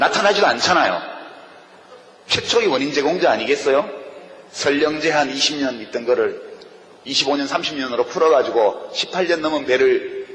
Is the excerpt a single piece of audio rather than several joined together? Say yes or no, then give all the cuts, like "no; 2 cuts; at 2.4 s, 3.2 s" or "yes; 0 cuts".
no; 1 cut; at 2.8 s